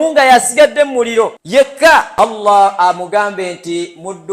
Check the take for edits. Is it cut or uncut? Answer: cut